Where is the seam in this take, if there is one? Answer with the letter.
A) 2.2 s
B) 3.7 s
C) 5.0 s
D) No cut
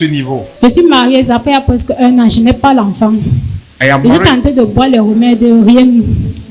D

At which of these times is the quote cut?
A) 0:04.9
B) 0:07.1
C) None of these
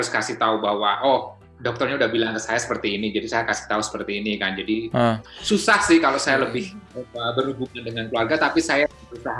C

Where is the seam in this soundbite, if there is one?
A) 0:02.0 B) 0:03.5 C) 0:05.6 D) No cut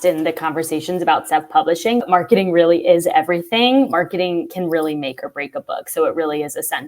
A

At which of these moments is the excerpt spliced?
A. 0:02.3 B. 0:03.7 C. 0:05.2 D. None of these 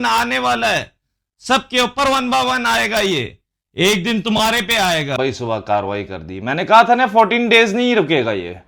C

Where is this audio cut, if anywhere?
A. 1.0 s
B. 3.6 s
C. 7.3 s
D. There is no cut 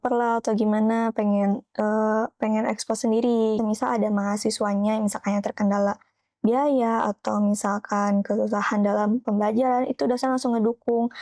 B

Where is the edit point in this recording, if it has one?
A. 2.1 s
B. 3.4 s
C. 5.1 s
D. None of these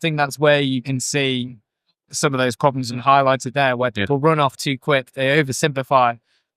A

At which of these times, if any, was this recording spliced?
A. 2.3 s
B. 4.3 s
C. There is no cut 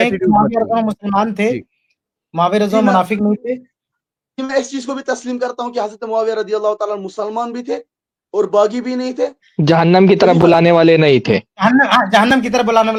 C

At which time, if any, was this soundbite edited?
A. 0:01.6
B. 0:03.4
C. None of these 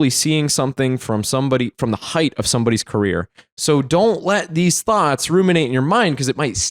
B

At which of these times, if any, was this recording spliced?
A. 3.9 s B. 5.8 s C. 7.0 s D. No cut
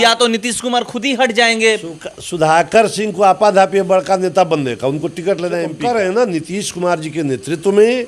B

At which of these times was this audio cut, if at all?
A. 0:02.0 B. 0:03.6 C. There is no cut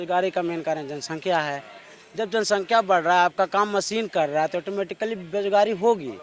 C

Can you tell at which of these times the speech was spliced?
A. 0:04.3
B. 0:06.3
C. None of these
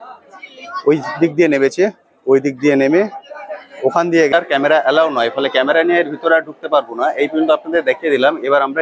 A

